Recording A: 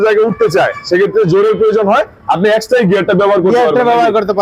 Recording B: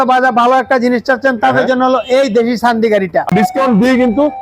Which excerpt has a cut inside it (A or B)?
B